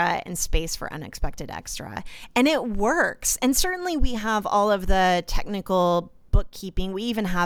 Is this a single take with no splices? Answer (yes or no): yes